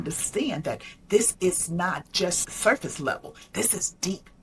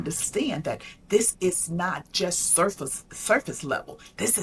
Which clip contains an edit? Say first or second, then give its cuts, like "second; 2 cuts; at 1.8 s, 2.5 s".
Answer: first; 1 cut; at 2.4 s